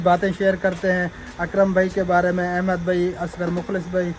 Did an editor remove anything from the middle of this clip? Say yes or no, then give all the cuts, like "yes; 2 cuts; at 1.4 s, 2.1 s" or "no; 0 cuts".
no; 0 cuts